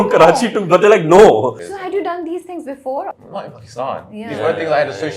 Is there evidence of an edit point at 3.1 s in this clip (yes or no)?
yes